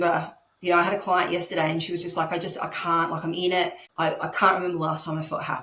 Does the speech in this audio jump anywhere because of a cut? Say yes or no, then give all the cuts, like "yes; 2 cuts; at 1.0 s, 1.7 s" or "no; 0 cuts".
yes; 1 cut; at 3.8 s